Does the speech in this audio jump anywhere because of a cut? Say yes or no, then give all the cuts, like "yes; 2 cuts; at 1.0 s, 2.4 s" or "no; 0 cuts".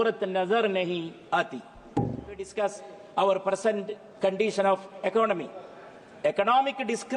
yes; 1 cut; at 2.5 s